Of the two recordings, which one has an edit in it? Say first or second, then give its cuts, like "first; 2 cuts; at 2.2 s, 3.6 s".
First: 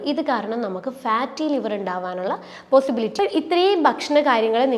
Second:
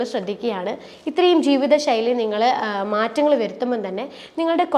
first; 1 cut; at 3.1 s